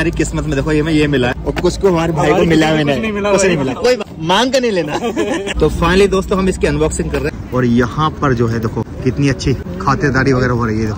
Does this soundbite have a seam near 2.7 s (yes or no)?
no